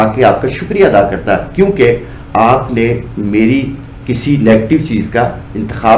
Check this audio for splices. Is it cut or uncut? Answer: uncut